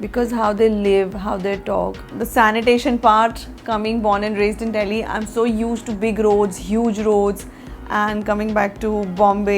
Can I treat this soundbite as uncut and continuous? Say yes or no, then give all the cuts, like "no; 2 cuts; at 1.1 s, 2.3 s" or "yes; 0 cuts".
no; 1 cut; at 2.1 s